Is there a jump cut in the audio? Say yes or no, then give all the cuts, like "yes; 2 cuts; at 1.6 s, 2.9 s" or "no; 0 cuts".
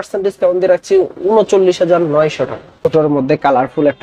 yes; 1 cut; at 2.9 s